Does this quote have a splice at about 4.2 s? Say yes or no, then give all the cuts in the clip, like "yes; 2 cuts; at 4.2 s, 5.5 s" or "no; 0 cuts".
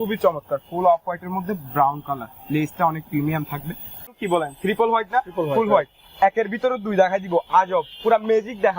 yes; 1 cut; at 4.2 s